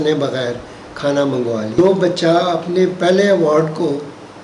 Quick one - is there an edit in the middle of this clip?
yes; 1 cut; at 1.8 s

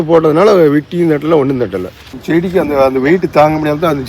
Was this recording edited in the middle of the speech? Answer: yes; 1 cut; at 2.1 s

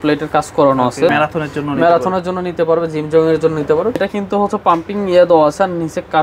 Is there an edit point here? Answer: yes; 2 cuts; at 1.1 s, 4.0 s

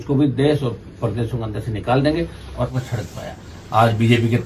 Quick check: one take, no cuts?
no; 1 cut; at 2.7 s

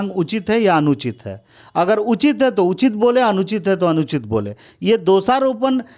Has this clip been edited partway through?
no; 0 cuts

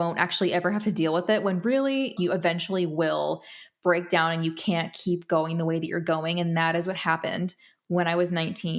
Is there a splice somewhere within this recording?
yes; 1 cut; at 2.1 s

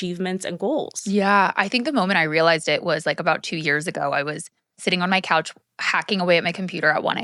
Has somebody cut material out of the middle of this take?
no; 0 cuts

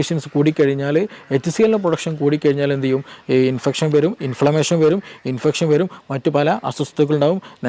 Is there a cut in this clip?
no; 0 cuts

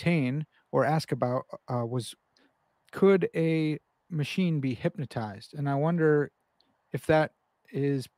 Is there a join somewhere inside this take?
no; 0 cuts

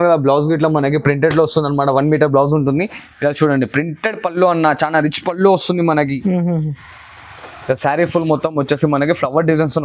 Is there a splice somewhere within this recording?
no; 0 cuts

